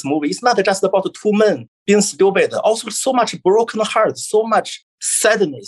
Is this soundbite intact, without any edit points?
no; 1 cut; at 1.1 s

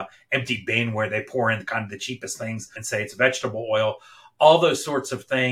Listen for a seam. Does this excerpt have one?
yes; 1 cut; at 2.8 s

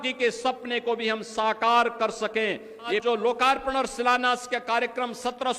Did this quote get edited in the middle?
yes; 1 cut; at 3.0 s

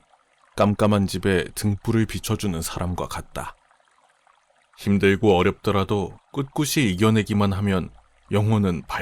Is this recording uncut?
yes; 0 cuts

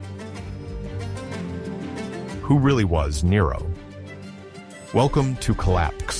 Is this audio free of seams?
yes; 0 cuts

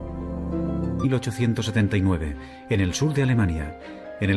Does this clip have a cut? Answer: no; 0 cuts

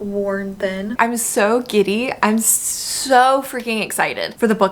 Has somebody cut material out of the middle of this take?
yes; 1 cut; at 1.0 s

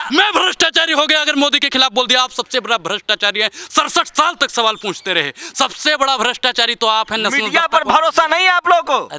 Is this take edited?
no; 0 cuts

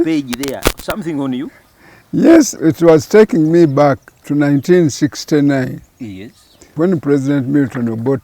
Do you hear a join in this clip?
yes; 3 cuts; at 2.6 s, 4.2 s, 6.7 s

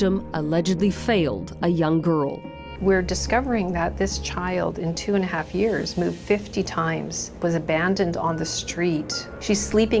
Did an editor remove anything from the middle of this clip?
no; 0 cuts

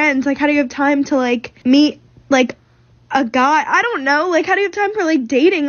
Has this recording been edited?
yes; 1 cut; at 1.5 s

